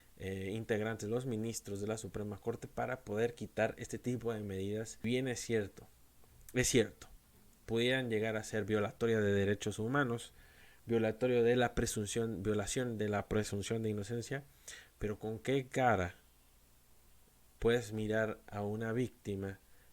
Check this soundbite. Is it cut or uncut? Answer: cut